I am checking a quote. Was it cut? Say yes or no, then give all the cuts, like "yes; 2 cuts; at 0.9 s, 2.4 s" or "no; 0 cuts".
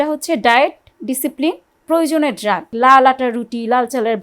yes; 1 cut; at 2.7 s